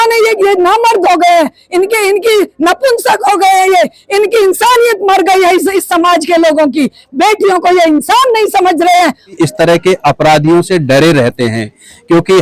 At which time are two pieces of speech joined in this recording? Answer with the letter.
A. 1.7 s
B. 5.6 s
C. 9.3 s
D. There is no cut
C